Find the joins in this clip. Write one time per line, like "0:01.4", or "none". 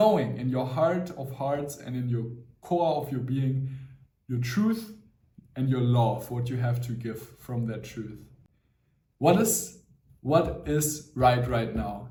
none